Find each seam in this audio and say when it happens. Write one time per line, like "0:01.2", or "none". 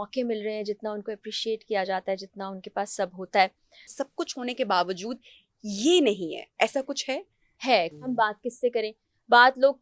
0:03.9
0:07.9